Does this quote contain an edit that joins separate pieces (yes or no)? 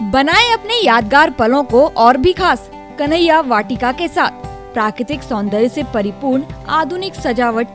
no